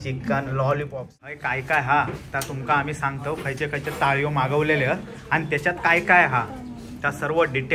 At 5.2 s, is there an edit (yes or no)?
no